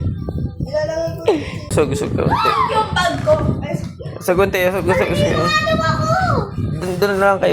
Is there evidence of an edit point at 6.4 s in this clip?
no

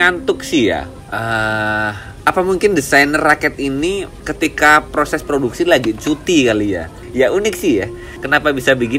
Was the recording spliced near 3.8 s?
no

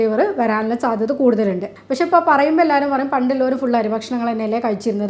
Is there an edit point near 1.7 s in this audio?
yes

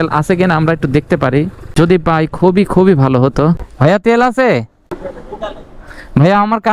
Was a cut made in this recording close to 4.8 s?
yes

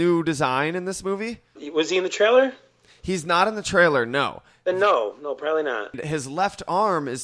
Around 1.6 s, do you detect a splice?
yes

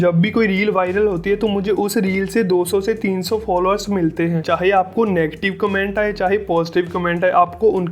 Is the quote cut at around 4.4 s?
yes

